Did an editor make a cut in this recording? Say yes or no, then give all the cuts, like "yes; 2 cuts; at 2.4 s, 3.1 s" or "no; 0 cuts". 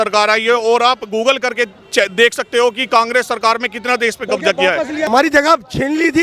yes; 1 cut; at 5.1 s